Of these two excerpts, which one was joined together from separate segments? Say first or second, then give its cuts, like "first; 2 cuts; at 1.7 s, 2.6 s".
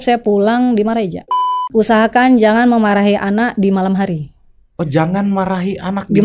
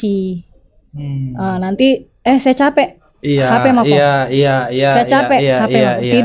first; 1 cut; at 1.7 s